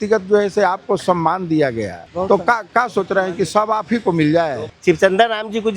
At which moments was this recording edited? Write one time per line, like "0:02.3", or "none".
0:02.0
0:04.7